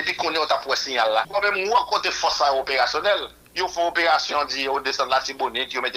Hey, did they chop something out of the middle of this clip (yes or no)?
yes